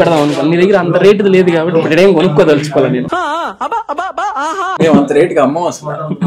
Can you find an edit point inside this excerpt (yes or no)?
no